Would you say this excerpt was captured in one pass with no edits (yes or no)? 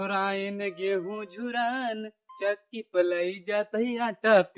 yes